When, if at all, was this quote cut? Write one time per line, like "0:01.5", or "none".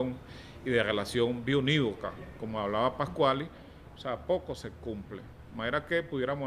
0:02.7